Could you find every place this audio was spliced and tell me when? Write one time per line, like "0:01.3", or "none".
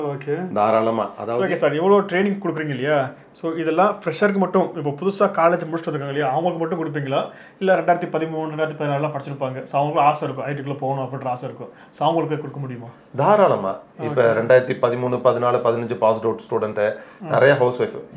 0:01.2

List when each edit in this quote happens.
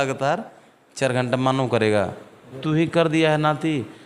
0:02.6

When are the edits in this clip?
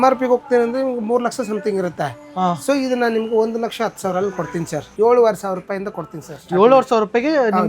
0:04.9

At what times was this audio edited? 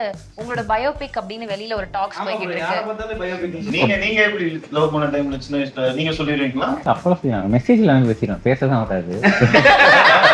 0:03.7
0:06.8

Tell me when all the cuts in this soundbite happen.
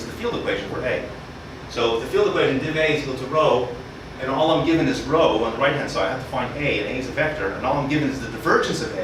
none

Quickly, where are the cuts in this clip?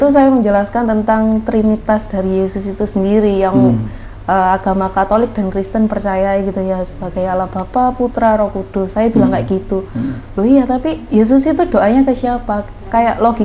none

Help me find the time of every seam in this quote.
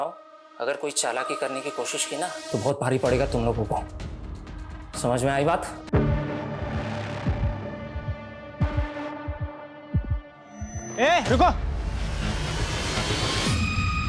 0:05.8

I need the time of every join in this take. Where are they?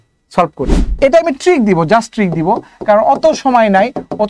0:01.0

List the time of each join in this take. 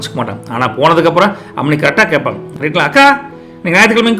0:02.5

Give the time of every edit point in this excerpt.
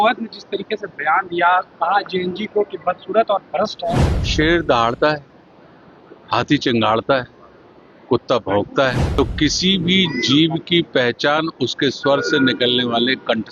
0:04.3
0:09.0

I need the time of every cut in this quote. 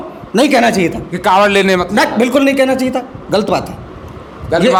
none

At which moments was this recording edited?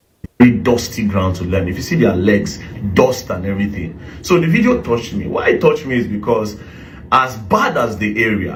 none

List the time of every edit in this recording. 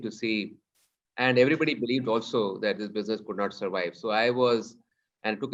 none

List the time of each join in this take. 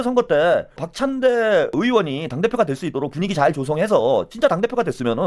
0:00.9
0:01.7

